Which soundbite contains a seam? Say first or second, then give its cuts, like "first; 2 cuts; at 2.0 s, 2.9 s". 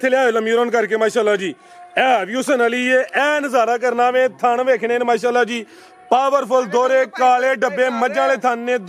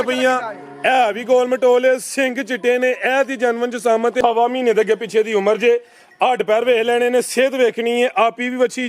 second; 1 cut; at 4.2 s